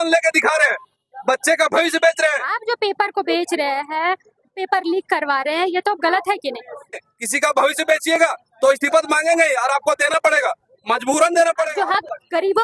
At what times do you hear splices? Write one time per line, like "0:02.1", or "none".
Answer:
0:02.5
0:07.0
0:11.7